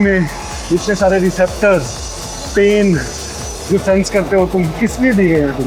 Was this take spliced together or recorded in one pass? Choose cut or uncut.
uncut